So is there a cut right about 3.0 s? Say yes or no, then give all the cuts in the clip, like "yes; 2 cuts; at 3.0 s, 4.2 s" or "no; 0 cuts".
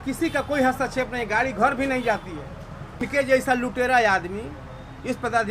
yes; 1 cut; at 3.0 s